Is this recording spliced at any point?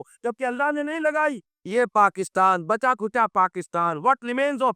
yes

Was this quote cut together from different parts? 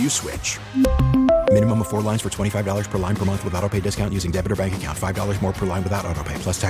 no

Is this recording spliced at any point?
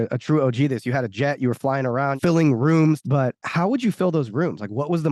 yes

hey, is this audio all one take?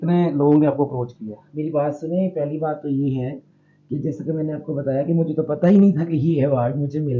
yes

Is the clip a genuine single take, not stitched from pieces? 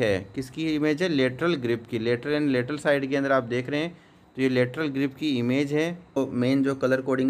no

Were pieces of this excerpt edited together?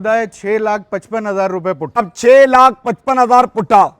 yes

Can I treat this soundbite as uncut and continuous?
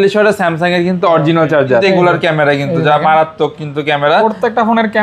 no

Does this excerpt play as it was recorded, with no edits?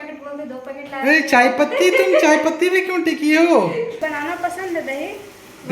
no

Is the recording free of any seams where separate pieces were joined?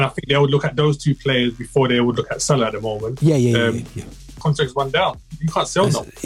no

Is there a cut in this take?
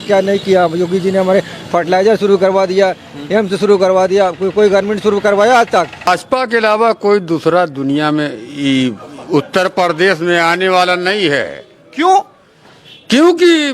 yes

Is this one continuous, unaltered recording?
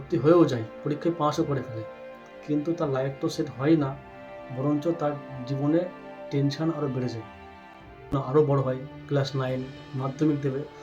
no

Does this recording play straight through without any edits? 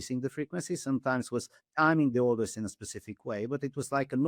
yes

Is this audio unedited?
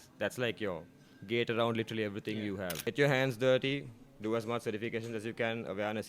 no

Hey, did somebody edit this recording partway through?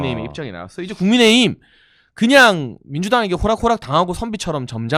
no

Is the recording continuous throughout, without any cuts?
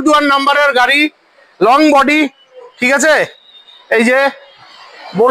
yes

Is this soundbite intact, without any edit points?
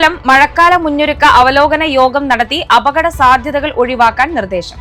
yes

